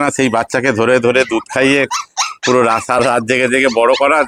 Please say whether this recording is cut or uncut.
uncut